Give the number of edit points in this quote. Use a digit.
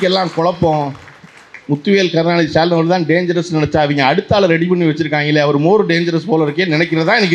0